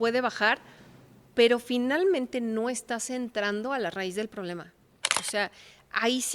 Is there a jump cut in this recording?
yes; 1 cut; at 5.1 s

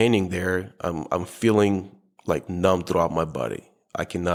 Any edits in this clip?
no; 0 cuts

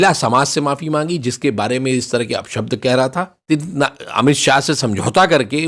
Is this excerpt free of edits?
no; 1 cut; at 3.5 s

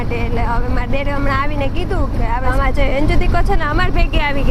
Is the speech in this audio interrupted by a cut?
yes; 1 cut; at 2.5 s

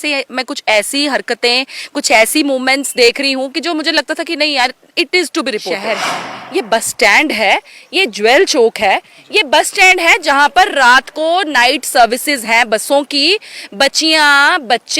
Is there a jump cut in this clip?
yes; 1 cut; at 5.8 s

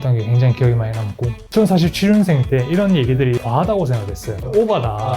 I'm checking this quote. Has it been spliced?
yes; 2 cuts; at 1.3 s, 3.4 s

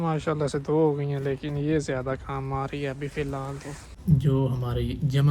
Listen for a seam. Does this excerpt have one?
yes; 1 cut; at 4.0 s

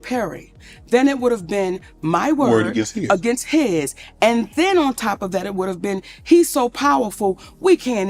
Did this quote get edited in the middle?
no; 0 cuts

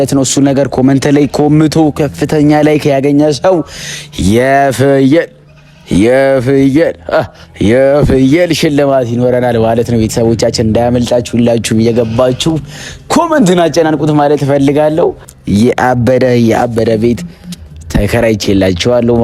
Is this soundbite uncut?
no; 1 cut; at 15.3 s

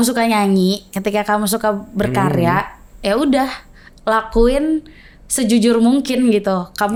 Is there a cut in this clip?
no; 0 cuts

